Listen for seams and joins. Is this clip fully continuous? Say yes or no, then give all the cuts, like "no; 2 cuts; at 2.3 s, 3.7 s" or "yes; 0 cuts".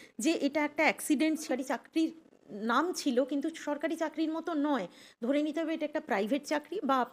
no; 1 cut; at 1.5 s